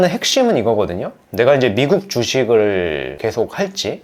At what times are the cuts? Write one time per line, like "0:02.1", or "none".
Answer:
none